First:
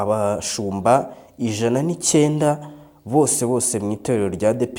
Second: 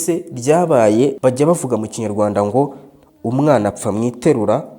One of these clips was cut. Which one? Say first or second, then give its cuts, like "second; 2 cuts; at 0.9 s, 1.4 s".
second; 1 cut; at 1.2 s